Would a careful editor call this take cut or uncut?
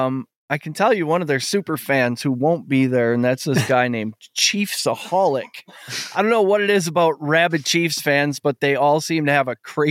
uncut